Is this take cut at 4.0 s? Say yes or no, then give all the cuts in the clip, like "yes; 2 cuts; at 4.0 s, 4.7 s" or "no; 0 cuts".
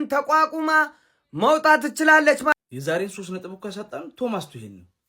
no; 1 cut; at 2.5 s